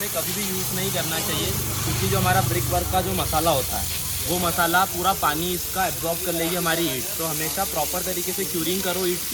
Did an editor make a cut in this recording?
no; 0 cuts

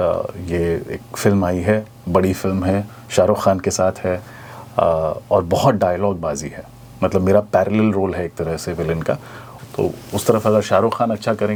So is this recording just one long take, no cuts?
yes; 0 cuts

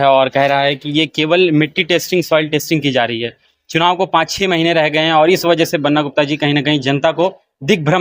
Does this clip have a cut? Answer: no; 0 cuts

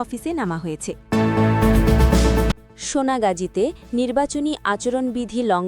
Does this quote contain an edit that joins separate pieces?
yes; 2 cuts; at 0.9 s, 2.6 s

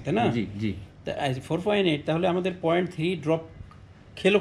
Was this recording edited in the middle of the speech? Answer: no; 0 cuts

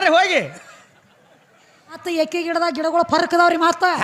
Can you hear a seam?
yes; 1 cut; at 2.0 s

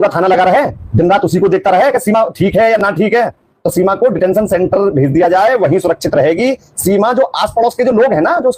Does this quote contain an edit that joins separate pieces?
no; 0 cuts

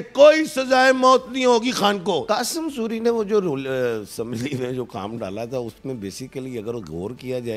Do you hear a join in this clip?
yes; 1 cut; at 2.2 s

